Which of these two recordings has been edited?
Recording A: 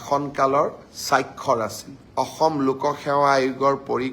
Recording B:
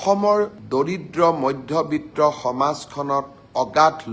A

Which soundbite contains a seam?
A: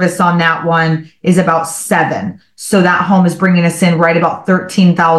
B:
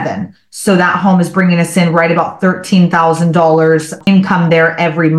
B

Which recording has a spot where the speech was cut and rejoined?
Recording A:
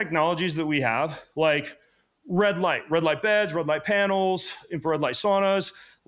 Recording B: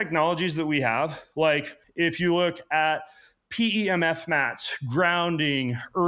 B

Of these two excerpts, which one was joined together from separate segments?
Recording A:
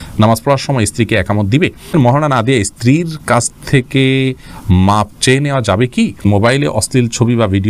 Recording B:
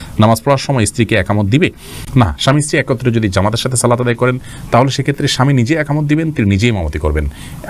A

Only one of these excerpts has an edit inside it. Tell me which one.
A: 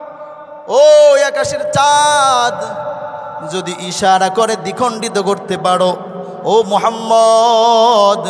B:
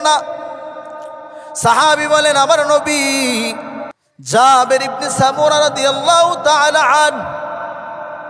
B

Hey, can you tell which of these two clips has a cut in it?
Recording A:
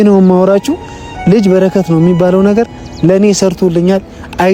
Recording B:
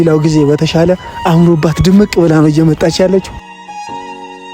B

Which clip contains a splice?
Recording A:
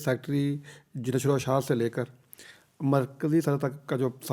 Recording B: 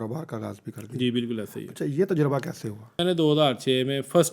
B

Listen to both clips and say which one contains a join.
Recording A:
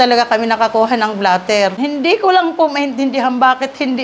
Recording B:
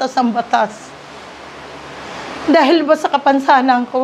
A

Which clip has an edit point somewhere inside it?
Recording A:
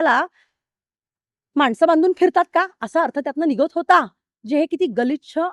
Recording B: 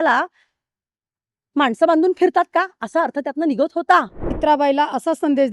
B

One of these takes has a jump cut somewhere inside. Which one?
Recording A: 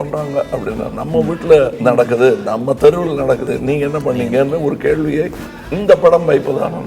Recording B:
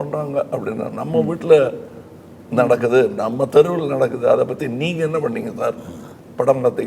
A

